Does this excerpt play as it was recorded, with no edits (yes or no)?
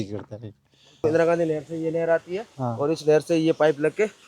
no